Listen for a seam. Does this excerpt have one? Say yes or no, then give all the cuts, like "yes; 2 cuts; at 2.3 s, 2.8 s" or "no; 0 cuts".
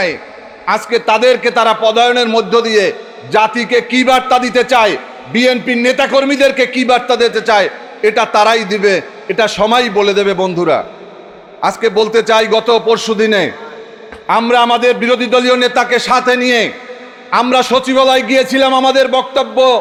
no; 0 cuts